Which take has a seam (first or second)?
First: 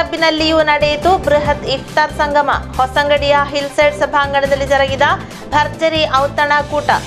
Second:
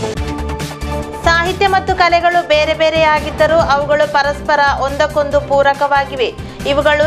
second